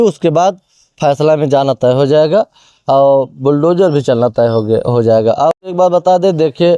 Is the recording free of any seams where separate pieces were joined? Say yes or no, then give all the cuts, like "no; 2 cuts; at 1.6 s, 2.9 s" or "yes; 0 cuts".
yes; 0 cuts